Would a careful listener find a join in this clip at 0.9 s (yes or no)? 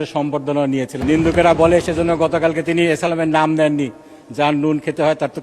yes